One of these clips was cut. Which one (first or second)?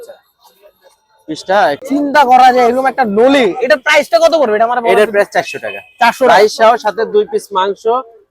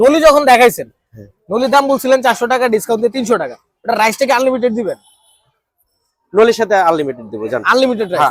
first